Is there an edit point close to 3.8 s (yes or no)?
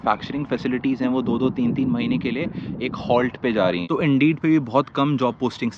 yes